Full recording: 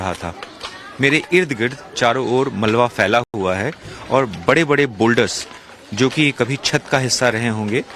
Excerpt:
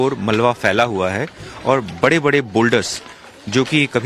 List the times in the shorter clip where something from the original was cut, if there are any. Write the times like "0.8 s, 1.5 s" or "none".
0.9 s